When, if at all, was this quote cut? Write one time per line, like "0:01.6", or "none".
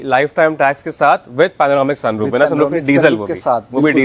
none